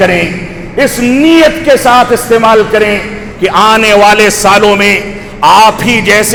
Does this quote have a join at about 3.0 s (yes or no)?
no